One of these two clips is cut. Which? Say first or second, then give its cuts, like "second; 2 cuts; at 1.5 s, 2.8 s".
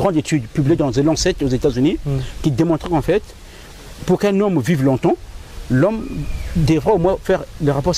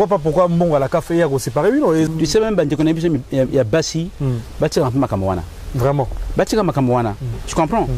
second; 1 cut; at 2.1 s